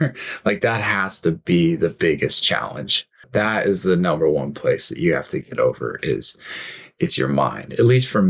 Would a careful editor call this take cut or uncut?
cut